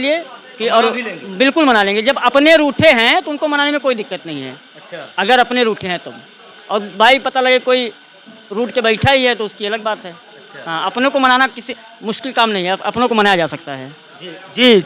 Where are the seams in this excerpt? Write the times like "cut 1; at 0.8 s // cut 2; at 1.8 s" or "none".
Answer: none